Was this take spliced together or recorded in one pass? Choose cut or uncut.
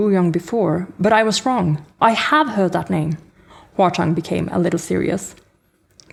uncut